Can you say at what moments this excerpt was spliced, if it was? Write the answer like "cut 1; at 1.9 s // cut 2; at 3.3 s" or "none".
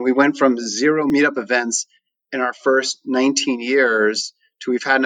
cut 1; at 1.1 s